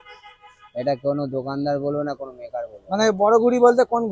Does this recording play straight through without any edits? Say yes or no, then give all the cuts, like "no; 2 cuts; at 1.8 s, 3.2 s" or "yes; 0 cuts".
yes; 0 cuts